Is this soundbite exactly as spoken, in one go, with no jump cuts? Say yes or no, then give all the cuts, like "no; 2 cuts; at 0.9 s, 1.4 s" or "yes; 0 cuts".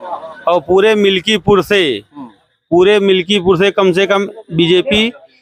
yes; 0 cuts